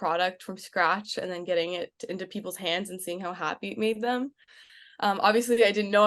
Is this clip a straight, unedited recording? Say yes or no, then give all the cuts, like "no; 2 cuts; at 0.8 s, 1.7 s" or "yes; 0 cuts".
yes; 0 cuts